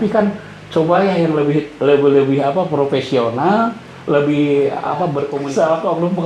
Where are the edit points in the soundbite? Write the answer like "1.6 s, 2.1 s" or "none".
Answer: 5.3 s